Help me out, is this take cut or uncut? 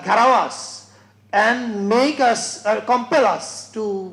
uncut